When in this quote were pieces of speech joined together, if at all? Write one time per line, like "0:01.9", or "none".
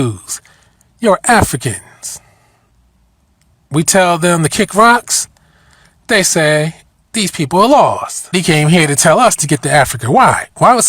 0:08.3